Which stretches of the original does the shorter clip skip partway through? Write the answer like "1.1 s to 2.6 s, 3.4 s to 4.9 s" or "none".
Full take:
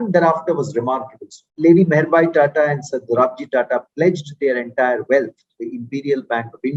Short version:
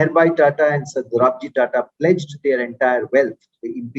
none

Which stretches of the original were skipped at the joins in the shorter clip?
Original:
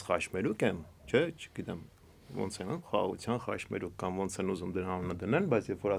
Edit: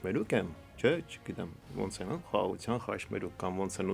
1.9 s to 2.2 s

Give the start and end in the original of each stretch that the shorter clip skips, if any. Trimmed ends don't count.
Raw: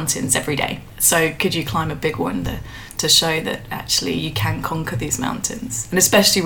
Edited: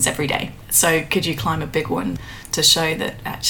2.6 s to 2.8 s

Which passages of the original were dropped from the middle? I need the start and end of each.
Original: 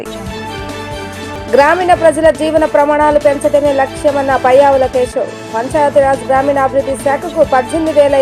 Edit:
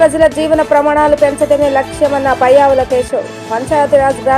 none

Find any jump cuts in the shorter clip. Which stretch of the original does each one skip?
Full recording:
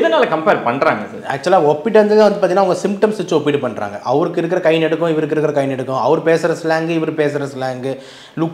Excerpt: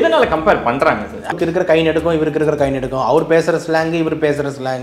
1.3 s to 4.3 s

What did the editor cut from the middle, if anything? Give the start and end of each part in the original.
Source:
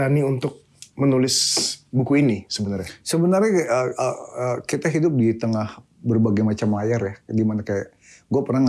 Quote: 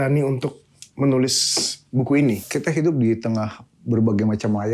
2.5 s to 4.6 s

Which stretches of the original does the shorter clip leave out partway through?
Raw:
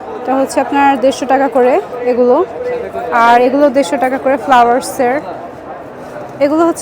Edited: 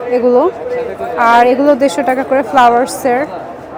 none

